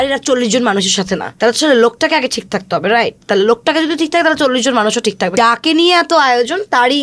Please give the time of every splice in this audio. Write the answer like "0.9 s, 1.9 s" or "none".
1.3 s, 5.3 s

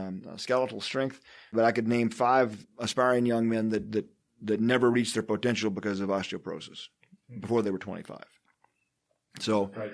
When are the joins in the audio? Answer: 1.5 s, 2.7 s

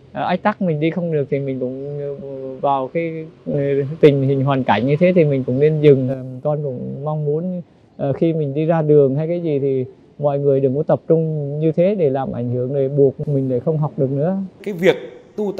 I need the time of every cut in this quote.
14.6 s

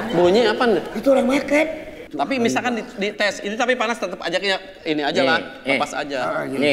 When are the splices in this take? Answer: 2.0 s

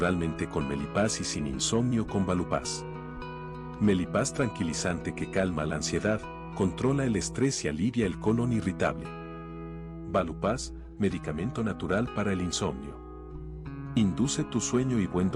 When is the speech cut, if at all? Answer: 11.5 s

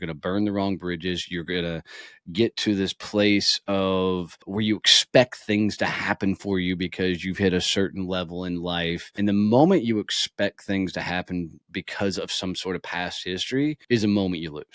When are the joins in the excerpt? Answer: 4.4 s, 9.0 s, 13.8 s

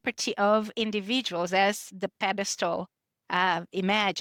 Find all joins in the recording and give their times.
none

